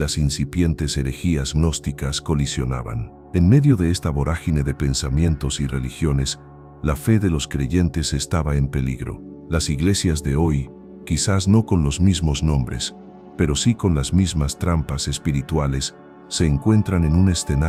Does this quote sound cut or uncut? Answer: uncut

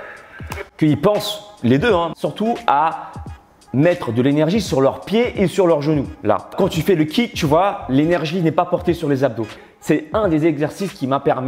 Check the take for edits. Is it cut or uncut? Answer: cut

